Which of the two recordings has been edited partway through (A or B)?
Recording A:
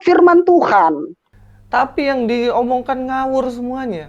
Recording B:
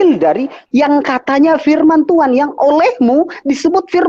A